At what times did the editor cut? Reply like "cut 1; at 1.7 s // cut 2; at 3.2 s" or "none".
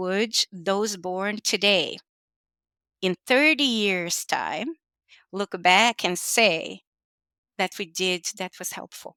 none